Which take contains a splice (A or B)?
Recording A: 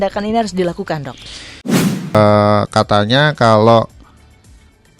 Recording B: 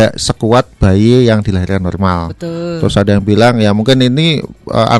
A